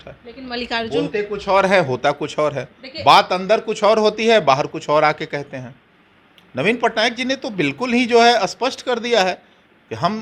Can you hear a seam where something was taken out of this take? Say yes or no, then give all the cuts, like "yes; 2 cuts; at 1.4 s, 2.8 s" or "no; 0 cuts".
no; 0 cuts